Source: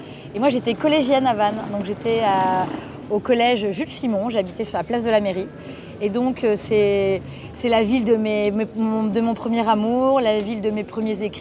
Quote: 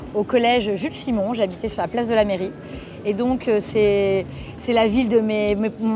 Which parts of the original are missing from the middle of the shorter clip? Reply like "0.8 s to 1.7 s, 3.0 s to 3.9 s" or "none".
none